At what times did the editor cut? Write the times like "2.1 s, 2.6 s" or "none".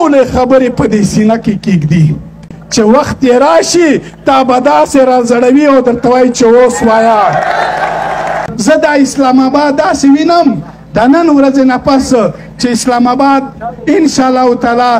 2.6 s, 8.5 s